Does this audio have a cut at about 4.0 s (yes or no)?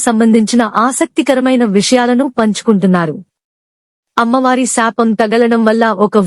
yes